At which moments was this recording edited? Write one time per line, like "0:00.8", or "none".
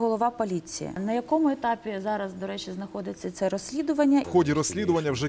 0:01.0
0:04.3